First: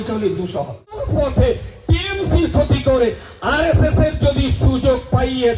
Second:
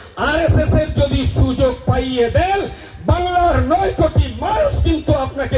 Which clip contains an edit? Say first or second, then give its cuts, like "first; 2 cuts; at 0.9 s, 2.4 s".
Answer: first; 1 cut; at 1.1 s